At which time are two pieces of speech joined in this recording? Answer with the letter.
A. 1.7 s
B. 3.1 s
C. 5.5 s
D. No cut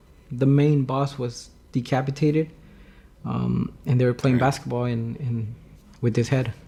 D